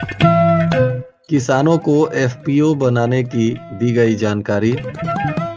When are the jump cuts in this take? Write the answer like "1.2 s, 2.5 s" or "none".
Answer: 1.1 s